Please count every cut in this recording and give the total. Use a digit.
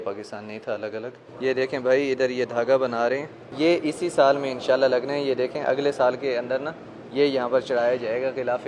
2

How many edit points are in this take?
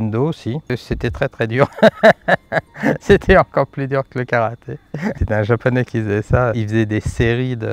3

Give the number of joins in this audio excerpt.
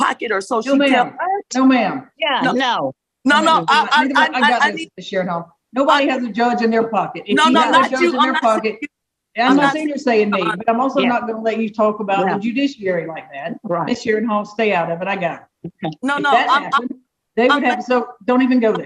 0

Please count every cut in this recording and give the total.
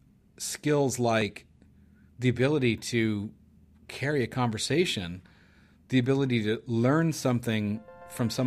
0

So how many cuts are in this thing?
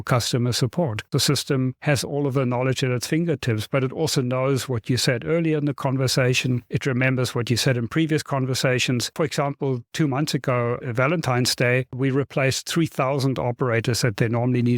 3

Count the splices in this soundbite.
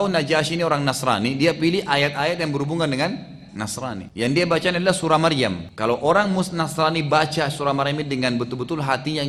2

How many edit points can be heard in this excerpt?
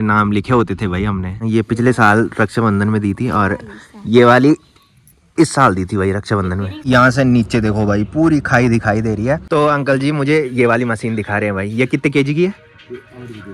3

